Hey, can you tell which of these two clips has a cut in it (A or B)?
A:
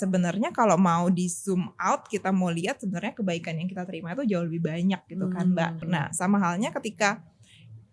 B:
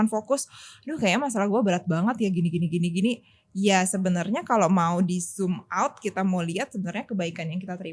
A